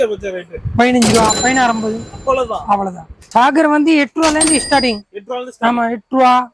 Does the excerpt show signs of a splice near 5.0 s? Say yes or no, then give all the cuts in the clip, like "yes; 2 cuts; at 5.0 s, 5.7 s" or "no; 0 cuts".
no; 1 cut; at 3.2 s